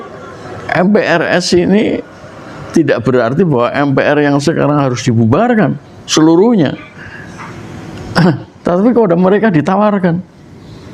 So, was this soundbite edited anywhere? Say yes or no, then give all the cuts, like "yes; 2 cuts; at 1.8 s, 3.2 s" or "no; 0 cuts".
no; 0 cuts